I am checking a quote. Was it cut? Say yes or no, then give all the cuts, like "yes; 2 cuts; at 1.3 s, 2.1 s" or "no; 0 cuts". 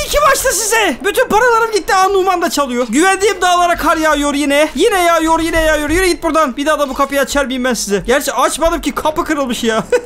no; 0 cuts